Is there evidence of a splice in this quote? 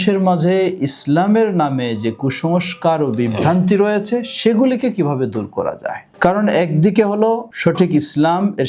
yes; 2 cuts; at 6.1 s, 7.5 s

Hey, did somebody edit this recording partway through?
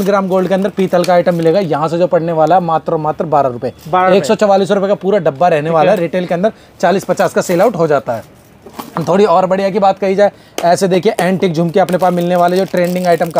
no; 0 cuts

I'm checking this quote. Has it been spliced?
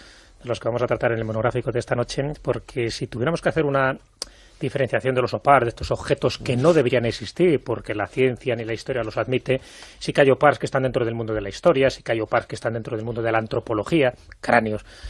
no; 0 cuts

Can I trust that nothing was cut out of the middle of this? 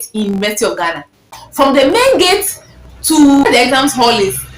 no; 2 cuts; at 1.4 s, 3.5 s

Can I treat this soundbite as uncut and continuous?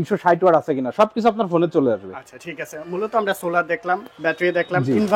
yes; 0 cuts

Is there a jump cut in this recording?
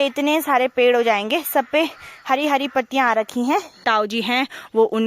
yes; 1 cut; at 3.8 s

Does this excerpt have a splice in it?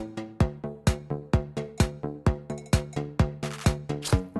no; 0 cuts

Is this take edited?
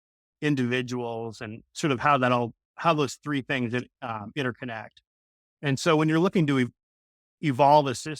yes; 1 cut; at 6.8 s

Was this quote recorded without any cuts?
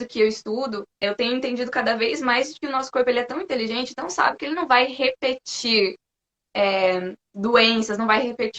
no; 1 cut; at 1.0 s

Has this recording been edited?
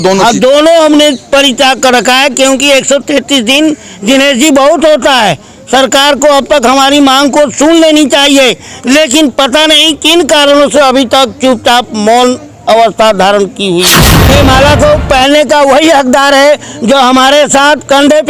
yes; 1 cut; at 14.1 s

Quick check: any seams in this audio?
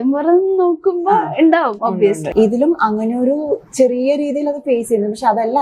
yes; 1 cut; at 2.3 s

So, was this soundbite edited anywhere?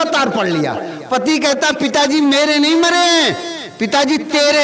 no; 0 cuts

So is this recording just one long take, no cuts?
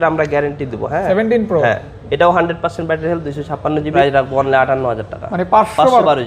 no; 2 cuts; at 1.0 s, 3.9 s

